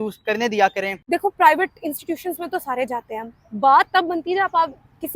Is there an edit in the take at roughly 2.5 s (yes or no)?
no